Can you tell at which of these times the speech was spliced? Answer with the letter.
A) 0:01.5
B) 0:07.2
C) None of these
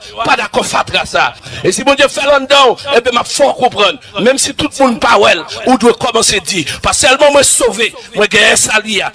A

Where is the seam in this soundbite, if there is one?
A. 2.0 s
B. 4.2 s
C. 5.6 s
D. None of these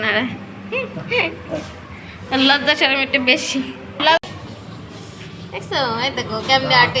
B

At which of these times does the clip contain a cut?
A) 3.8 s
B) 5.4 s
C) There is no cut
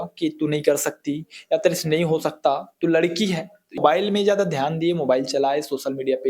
A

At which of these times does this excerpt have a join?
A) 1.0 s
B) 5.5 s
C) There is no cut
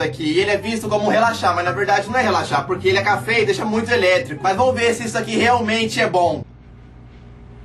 C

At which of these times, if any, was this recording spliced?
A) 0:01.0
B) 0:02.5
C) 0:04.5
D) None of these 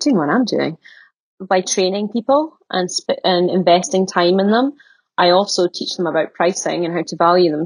A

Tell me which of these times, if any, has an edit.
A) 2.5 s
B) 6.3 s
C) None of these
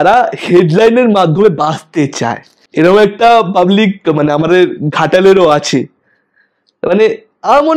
C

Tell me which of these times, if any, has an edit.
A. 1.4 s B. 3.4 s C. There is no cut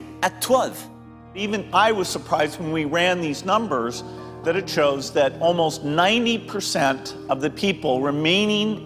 A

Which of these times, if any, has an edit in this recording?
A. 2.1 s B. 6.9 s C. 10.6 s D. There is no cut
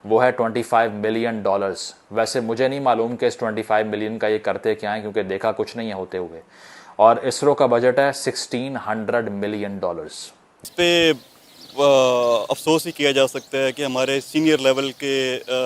C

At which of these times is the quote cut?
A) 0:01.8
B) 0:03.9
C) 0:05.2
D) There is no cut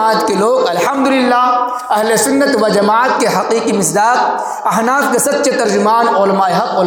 D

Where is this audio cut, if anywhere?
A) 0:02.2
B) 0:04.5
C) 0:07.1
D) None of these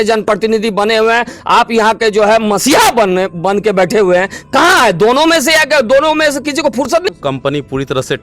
C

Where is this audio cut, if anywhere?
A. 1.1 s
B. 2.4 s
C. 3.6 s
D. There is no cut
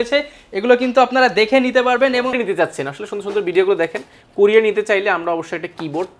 B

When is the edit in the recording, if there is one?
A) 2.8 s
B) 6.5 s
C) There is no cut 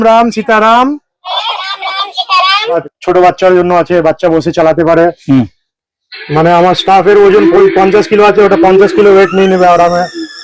A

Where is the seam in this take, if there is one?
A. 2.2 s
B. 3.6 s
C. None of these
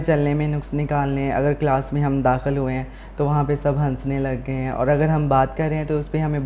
C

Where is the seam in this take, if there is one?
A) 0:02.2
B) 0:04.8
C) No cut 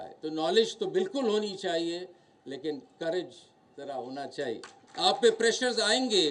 B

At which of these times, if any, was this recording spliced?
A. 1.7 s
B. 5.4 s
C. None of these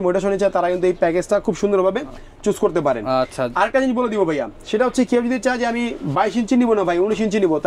C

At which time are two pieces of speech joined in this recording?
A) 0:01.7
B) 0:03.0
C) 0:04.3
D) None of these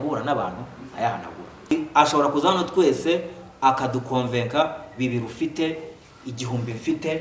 A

